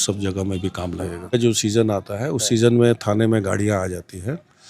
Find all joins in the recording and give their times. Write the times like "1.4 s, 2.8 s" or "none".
1.3 s